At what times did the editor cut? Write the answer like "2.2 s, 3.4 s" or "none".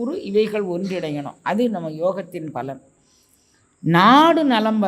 none